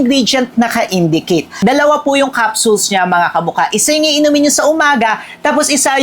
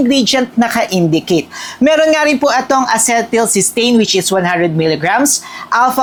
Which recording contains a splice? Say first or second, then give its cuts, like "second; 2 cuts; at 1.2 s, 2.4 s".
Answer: first; 1 cut; at 1.5 s